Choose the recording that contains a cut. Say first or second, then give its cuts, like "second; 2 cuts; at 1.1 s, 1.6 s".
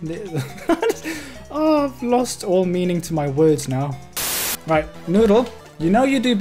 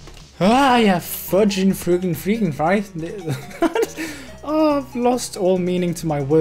first; 1 cut; at 4.5 s